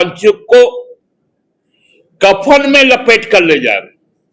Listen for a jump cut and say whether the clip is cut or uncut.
uncut